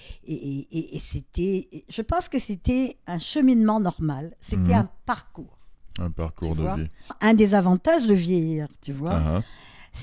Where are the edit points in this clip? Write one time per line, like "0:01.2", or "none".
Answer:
0:07.2